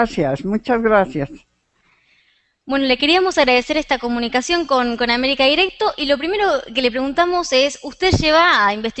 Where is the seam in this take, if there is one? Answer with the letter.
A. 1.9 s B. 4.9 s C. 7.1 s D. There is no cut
B